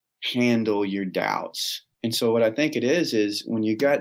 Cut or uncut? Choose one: cut